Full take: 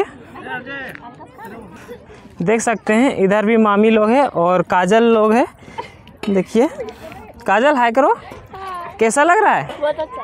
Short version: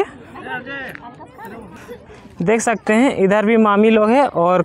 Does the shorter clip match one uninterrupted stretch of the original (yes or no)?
yes